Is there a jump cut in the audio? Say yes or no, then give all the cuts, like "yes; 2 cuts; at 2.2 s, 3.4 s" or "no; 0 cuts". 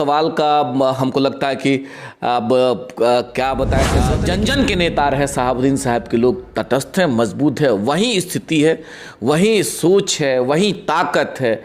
yes; 1 cut; at 4.0 s